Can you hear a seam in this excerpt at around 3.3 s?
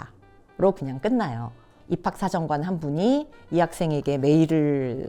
no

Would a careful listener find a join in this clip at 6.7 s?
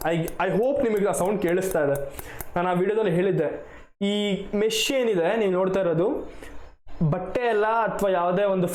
no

